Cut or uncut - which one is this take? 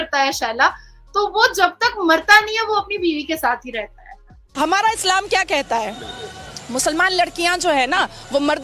cut